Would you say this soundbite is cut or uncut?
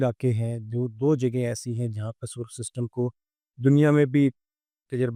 uncut